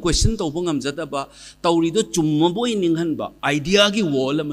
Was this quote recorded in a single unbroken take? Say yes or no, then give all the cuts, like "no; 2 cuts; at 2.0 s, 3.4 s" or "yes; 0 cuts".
no; 1 cut; at 3.3 s